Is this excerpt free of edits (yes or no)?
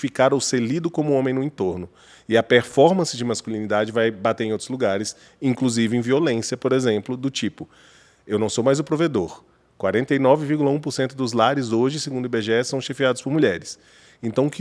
yes